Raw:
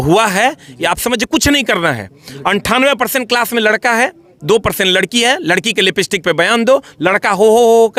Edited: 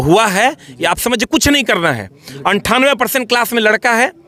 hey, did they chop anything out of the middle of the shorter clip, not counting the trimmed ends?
no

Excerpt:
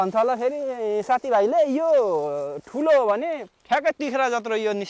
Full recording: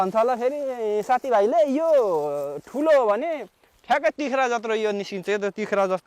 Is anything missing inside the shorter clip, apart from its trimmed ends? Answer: yes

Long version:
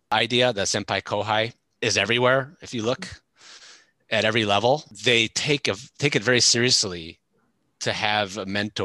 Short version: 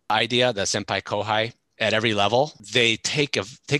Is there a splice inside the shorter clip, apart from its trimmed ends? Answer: yes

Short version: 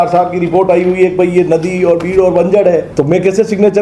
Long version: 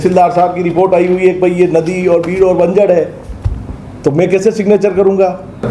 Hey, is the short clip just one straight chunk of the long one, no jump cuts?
no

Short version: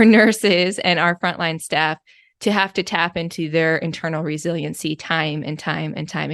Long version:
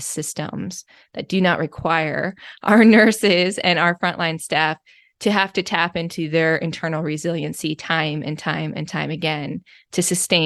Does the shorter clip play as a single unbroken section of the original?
yes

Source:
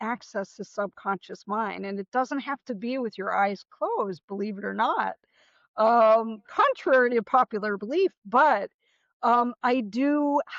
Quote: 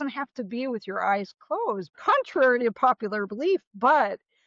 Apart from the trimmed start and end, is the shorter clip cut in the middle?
yes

